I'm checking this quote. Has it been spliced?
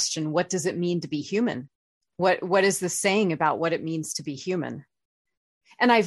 yes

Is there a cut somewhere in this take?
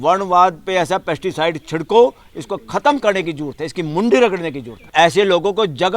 yes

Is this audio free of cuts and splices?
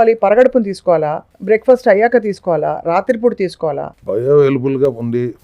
no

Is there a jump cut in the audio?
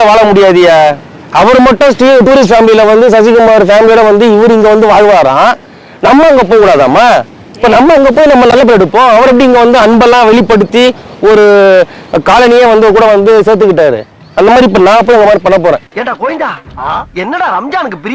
no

